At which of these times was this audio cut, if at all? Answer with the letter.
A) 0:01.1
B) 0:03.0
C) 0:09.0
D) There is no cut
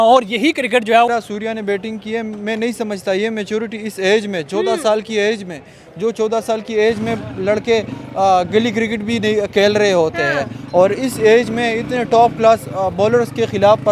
A